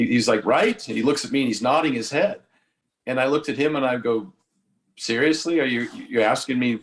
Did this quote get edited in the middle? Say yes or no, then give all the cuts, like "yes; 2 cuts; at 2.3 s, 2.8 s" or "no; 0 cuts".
no; 0 cuts